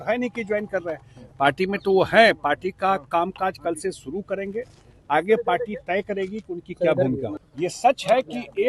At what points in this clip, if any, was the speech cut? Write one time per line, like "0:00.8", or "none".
0:07.4